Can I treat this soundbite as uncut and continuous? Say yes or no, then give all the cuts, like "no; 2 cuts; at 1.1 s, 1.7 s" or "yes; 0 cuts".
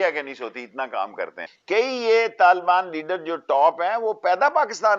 no; 1 cut; at 1.5 s